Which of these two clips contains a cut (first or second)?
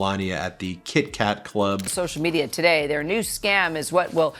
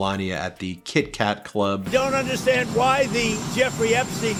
first